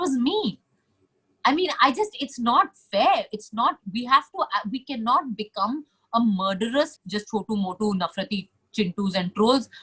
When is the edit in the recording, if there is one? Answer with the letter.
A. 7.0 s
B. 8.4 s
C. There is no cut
A